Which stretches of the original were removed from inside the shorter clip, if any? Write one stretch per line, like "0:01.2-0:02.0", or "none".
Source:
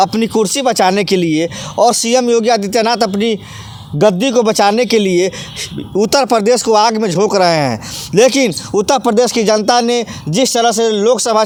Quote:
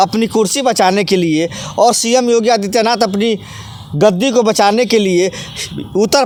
none